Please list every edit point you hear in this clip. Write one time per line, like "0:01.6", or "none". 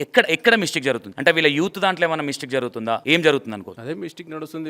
0:01.1
0:03.0
0:03.7